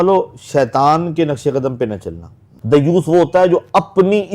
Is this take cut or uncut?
cut